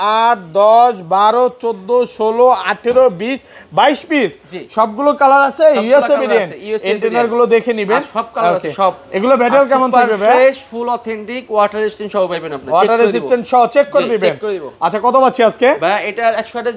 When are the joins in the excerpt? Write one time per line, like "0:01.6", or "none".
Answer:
none